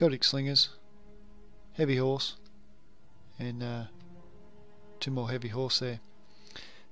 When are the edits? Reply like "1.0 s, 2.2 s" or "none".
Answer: 5.3 s